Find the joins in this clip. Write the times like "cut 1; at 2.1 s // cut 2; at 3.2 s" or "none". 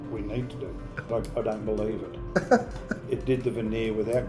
cut 1; at 1.1 s